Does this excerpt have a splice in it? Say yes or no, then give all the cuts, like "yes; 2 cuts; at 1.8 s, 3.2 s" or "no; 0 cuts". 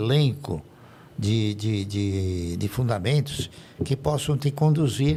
no; 0 cuts